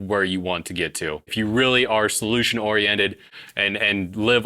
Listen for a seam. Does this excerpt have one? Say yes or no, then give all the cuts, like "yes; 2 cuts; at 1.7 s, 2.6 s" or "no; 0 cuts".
yes; 2 cuts; at 1.3 s, 3.3 s